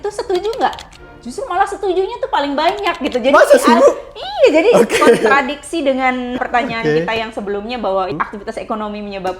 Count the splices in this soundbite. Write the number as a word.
two